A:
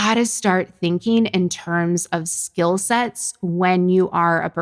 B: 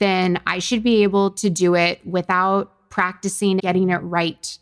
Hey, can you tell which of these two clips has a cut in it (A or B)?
B